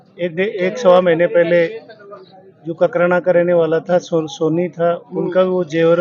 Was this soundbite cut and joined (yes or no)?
no